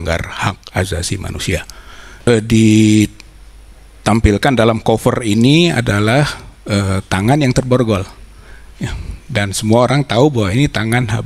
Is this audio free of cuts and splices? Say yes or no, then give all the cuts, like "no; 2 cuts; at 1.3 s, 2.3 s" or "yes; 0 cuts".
no; 1 cut; at 2.3 s